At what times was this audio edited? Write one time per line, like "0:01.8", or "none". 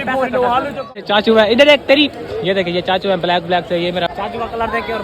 0:01.0
0:04.1